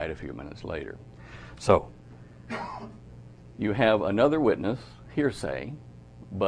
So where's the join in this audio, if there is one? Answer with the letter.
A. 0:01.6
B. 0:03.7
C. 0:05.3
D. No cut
A